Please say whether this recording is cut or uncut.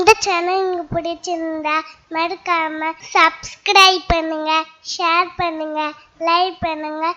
cut